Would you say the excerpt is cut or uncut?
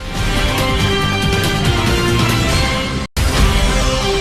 uncut